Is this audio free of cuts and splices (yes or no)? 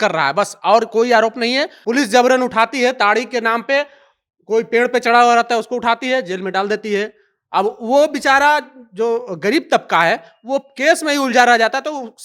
no